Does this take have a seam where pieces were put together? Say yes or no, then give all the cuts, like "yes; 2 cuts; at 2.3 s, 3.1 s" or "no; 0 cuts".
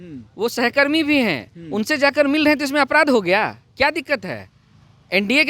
no; 0 cuts